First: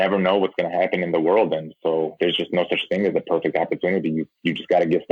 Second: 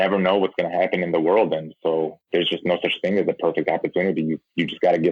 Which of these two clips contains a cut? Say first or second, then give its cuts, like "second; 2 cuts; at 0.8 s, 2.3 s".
first; 1 cut; at 2.1 s